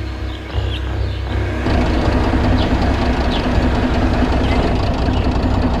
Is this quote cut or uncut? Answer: uncut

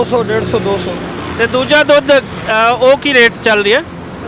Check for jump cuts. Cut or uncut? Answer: uncut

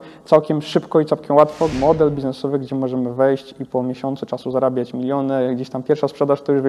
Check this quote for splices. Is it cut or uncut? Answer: cut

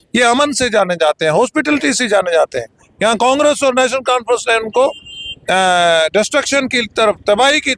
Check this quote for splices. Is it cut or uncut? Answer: uncut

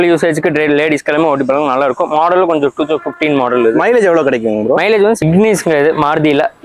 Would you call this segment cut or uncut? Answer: cut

